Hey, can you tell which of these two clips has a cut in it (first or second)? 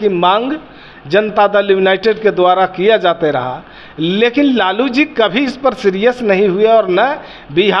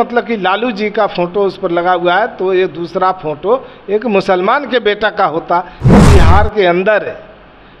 second